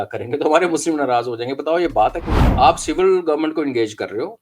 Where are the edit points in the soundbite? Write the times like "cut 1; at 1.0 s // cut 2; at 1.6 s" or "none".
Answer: cut 1; at 2.4 s